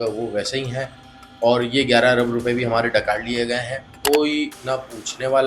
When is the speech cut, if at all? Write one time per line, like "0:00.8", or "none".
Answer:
0:03.9